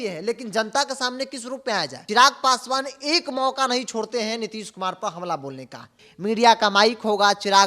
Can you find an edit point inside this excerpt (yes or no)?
yes